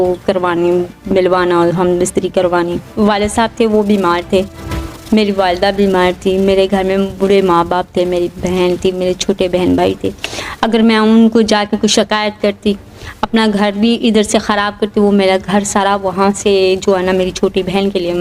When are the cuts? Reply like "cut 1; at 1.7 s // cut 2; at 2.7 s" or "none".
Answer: cut 1; at 2.9 s

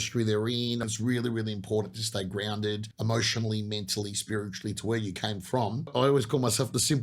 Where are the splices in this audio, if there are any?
cut 1; at 0.9 s // cut 2; at 2.9 s // cut 3; at 5.9 s

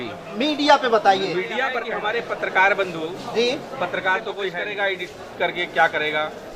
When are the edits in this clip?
cut 1; at 1.7 s // cut 2; at 4.6 s

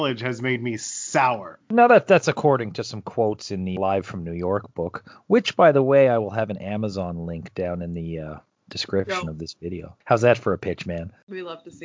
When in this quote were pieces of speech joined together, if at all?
cut 1; at 1.5 s // cut 2; at 3.8 s

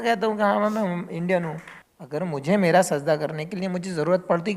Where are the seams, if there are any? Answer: cut 1; at 2.1 s

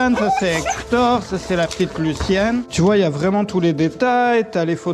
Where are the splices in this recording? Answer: cut 1; at 2.7 s

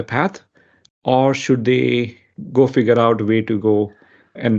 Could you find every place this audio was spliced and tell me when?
none

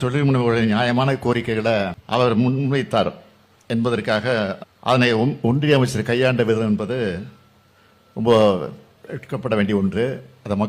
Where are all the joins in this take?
cut 1; at 2.0 s // cut 2; at 4.7 s

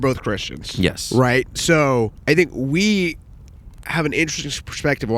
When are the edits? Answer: cut 1; at 2.2 s

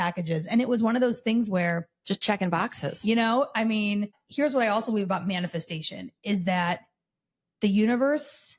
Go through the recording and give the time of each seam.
cut 1; at 4.2 s

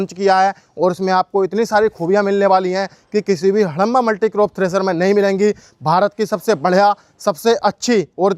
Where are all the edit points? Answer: none

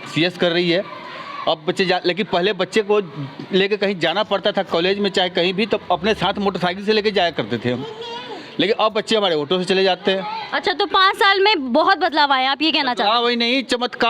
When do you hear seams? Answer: none

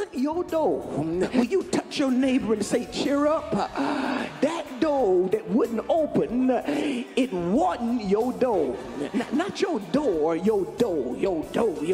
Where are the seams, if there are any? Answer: cut 1; at 1.3 s // cut 2; at 4.3 s // cut 3; at 9.0 s

